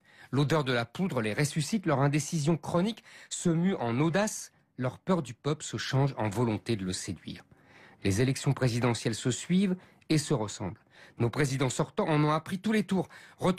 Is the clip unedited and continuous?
yes; 0 cuts

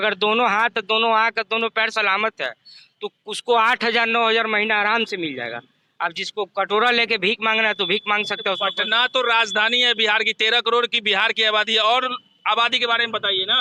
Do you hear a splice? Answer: no; 0 cuts

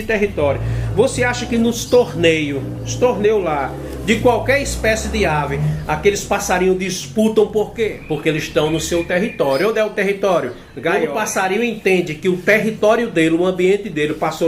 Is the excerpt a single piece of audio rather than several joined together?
no; 2 cuts; at 7.9 s, 11.0 s

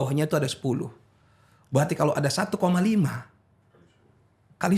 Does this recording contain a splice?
no; 0 cuts

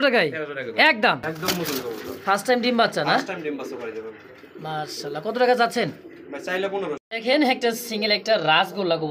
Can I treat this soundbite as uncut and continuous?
no; 2 cuts; at 1.3 s, 7.0 s

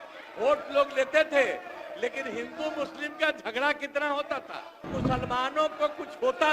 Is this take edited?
yes; 1 cut; at 4.9 s

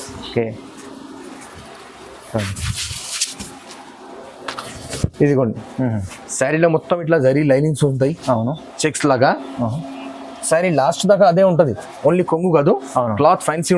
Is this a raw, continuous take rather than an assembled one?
yes; 0 cuts

